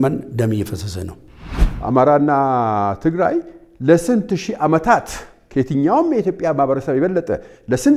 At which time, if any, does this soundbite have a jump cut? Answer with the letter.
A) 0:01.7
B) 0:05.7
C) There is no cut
A